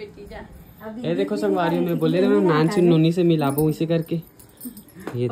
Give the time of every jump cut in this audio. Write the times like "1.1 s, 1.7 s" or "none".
none